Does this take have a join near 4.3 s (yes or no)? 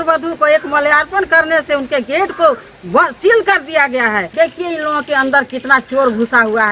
yes